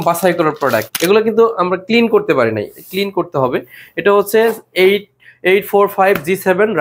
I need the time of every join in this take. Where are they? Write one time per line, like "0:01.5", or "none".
0:00.9